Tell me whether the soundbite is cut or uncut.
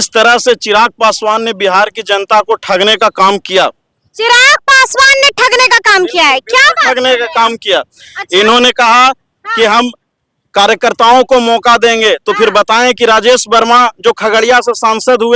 uncut